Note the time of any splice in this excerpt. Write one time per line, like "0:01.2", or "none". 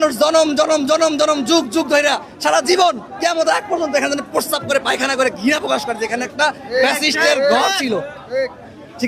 none